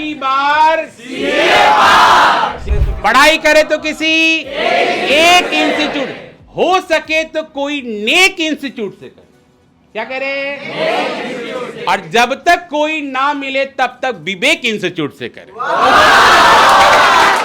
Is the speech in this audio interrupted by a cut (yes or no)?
yes